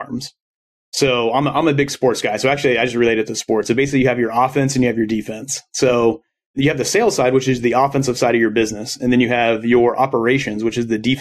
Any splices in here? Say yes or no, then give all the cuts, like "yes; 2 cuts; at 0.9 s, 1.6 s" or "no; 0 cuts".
no; 0 cuts